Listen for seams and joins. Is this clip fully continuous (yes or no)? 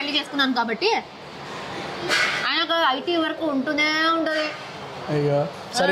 yes